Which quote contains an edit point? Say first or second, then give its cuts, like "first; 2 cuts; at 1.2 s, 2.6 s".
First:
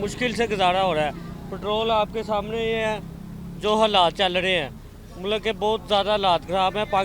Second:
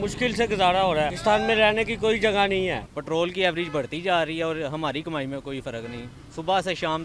second; 2 cuts; at 1.2 s, 2.9 s